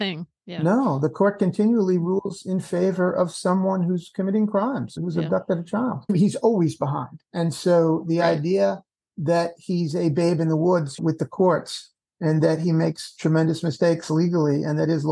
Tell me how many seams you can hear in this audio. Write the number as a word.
two